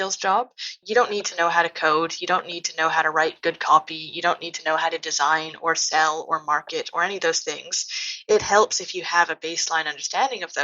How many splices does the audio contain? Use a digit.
0